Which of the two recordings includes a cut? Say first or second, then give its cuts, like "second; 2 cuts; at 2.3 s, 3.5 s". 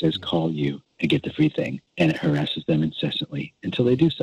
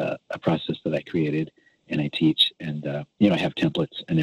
first; 2 cuts; at 0.9 s, 1.8 s